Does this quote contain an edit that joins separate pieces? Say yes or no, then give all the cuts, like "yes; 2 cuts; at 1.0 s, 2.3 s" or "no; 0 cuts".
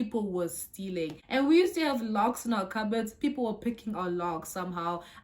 yes; 1 cut; at 1.2 s